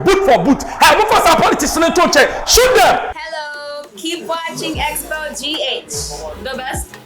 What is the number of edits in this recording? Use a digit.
1